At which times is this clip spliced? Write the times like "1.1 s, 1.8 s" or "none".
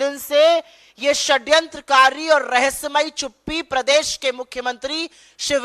none